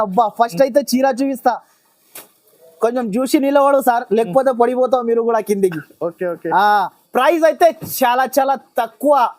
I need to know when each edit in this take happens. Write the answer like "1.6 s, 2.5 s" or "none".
7.0 s